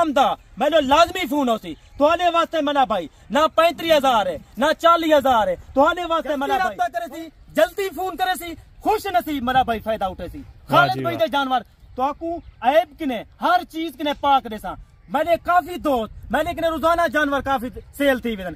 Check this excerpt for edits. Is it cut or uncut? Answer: cut